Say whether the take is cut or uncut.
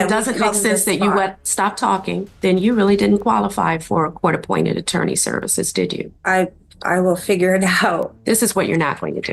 cut